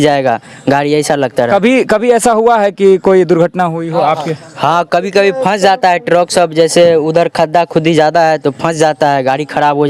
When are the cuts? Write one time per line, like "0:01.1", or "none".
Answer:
none